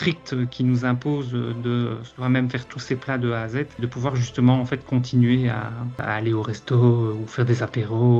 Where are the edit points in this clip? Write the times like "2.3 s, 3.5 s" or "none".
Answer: none